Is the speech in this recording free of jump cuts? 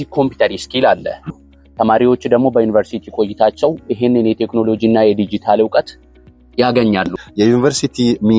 no; 2 cuts; at 1.3 s, 7.2 s

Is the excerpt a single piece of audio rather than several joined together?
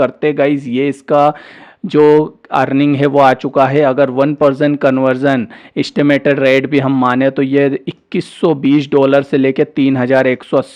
yes; 0 cuts

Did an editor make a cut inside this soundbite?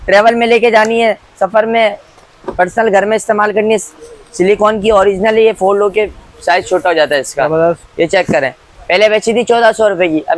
no; 0 cuts

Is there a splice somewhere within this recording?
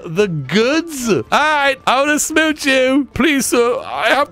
yes; 2 cuts; at 1.2 s, 3.1 s

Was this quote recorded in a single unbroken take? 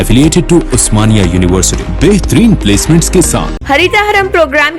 no; 1 cut; at 3.5 s

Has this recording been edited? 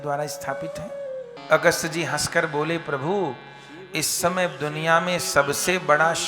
yes; 1 cut; at 1.4 s

